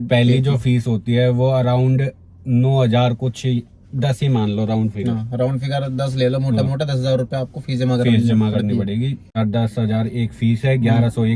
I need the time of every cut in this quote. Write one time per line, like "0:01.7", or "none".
none